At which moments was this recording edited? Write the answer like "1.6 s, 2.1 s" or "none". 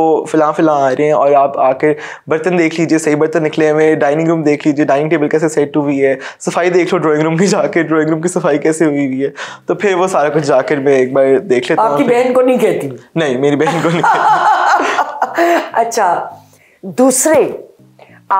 none

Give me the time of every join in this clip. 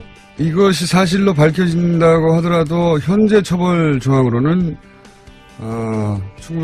none

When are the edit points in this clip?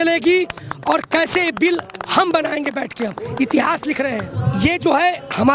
4.3 s

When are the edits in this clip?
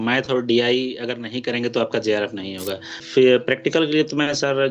2.9 s

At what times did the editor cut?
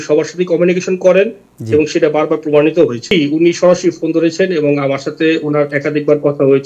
3.0 s

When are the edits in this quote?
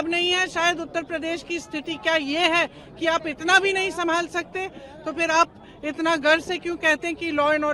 none

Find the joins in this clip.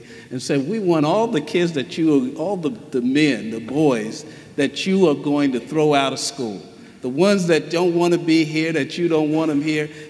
none

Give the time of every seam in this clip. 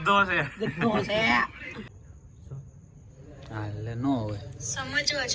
1.7 s

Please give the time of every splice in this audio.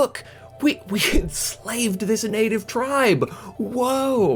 none

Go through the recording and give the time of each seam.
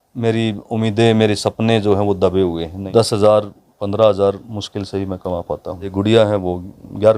2.7 s, 5.9 s

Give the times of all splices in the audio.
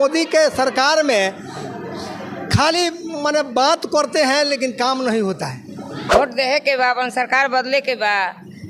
6.1 s

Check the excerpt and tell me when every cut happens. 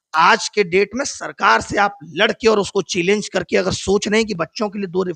none

